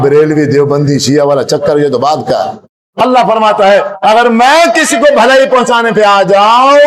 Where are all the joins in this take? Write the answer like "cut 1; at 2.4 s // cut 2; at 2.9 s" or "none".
cut 1; at 2.9 s